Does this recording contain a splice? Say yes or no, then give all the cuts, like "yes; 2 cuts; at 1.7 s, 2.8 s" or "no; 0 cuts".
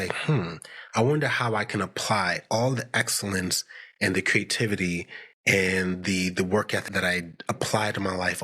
yes; 1 cut; at 6.8 s